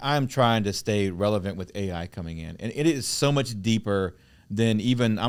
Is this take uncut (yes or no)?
yes